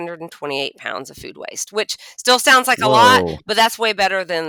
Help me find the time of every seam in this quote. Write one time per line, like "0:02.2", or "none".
none